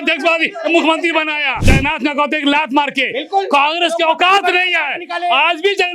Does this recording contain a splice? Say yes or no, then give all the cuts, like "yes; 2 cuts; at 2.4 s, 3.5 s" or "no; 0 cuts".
yes; 1 cut; at 1.6 s